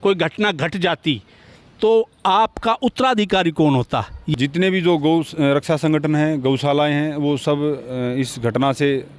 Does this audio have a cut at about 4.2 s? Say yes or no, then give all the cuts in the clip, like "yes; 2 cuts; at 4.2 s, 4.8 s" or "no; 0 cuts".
yes; 1 cut; at 4.2 s